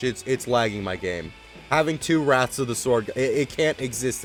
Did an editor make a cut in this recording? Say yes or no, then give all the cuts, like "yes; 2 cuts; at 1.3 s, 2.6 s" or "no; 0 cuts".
no; 0 cuts